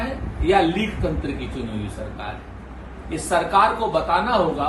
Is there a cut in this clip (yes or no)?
no